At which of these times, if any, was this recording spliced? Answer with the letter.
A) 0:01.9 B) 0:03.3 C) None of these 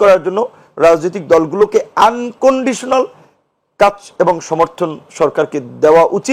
C